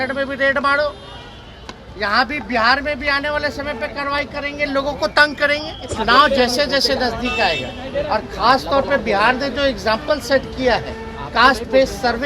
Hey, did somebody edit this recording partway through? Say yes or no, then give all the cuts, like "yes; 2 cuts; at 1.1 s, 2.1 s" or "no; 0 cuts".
yes; 1 cut; at 5.9 s